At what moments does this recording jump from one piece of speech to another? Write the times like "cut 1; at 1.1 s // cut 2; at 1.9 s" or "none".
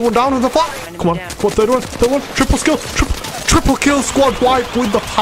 cut 1; at 0.9 s